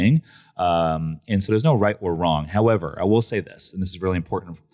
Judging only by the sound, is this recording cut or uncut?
uncut